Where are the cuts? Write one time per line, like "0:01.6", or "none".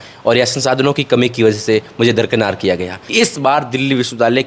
0:03.0